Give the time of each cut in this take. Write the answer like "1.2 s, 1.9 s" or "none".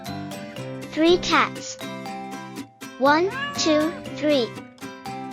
1.5 s, 3.0 s